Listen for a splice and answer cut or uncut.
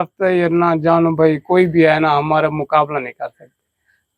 uncut